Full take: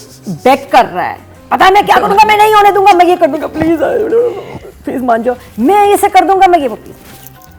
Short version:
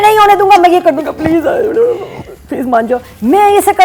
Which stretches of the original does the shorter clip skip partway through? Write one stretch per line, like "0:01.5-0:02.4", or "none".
none